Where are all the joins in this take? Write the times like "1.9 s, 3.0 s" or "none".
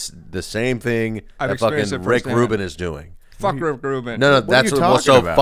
none

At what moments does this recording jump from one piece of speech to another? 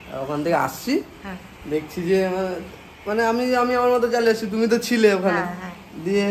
none

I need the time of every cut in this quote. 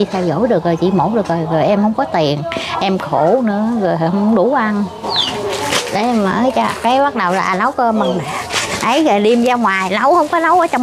5.0 s

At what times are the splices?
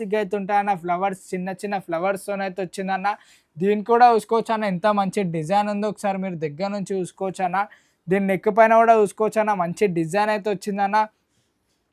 none

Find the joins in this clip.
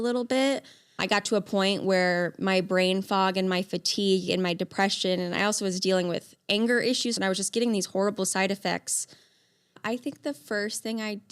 1.0 s, 7.2 s, 9.8 s

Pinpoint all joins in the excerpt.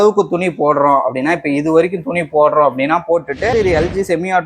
3.5 s

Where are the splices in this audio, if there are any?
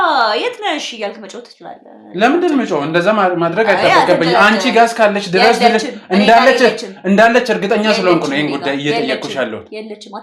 none

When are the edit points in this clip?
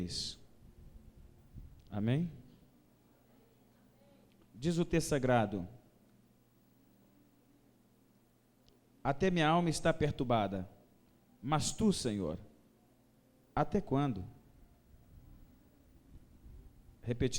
1.6 s

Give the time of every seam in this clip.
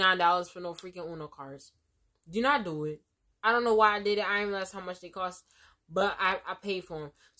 none

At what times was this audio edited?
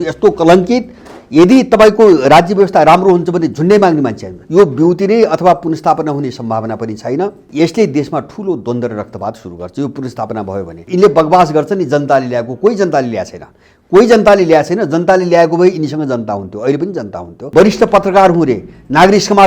4.3 s, 7.4 s, 10.8 s, 17.5 s

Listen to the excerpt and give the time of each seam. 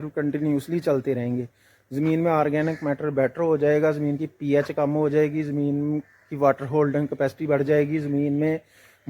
1.2 s

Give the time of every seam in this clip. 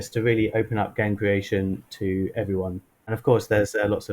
3.1 s

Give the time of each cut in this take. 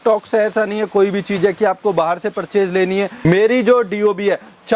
3.2 s

